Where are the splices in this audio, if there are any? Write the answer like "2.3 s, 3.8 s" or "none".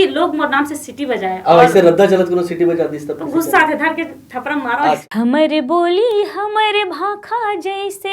5.0 s